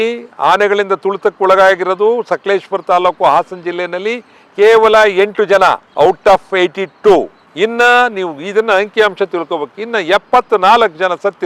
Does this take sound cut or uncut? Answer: uncut